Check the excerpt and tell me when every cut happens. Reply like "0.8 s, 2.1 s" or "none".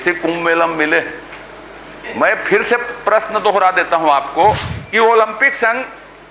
4.8 s